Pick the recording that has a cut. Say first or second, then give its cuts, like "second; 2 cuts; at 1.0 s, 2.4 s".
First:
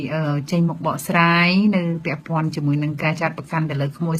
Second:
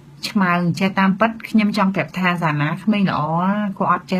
second; 1 cut; at 2.2 s